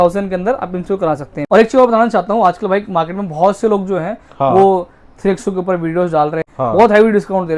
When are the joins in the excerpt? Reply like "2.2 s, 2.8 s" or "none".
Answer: 1.3 s, 6.5 s

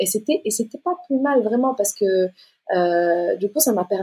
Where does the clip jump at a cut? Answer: none

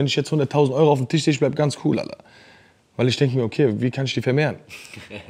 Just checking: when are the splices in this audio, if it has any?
none

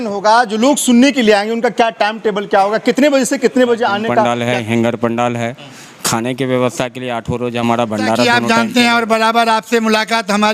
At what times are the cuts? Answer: 4.2 s, 8.2 s

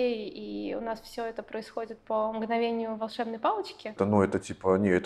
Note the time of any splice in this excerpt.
4.0 s

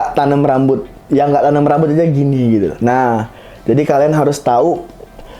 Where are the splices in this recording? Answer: none

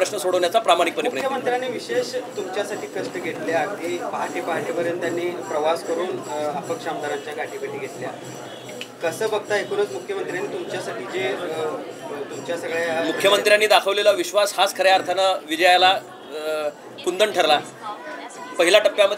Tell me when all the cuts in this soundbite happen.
none

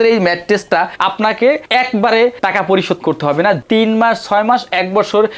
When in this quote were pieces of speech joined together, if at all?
0.9 s, 3.6 s

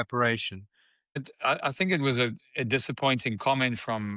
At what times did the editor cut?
1.2 s

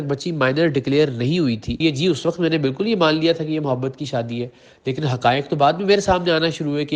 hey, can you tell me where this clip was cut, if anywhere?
1.8 s

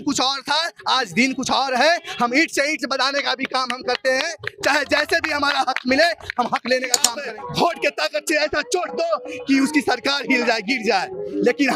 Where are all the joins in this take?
7.1 s

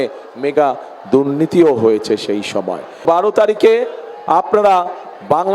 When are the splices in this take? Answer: 3.0 s

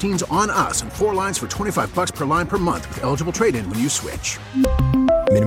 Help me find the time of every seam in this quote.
none

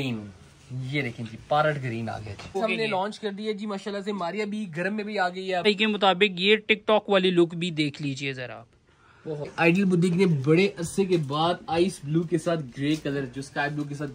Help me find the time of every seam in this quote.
2.6 s, 5.7 s, 9.5 s

